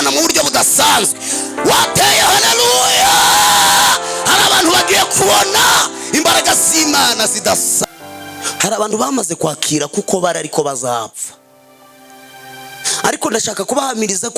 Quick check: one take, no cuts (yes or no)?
no